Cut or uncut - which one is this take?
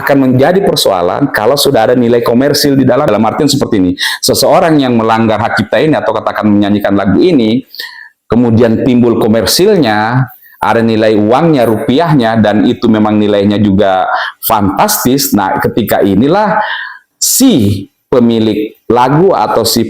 cut